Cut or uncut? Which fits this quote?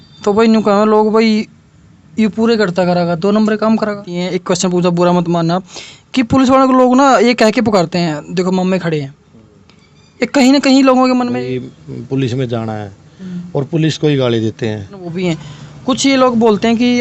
cut